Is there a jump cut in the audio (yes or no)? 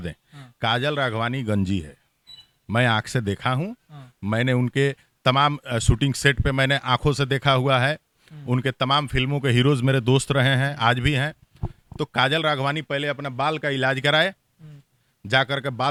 no